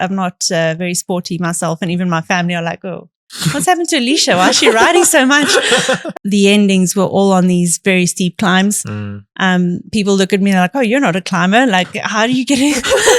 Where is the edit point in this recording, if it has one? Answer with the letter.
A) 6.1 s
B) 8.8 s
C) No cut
A